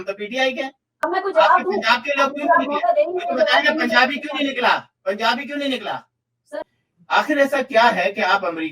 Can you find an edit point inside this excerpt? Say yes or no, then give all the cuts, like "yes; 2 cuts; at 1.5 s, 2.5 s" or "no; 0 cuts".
yes; 2 cuts; at 1.0 s, 6.5 s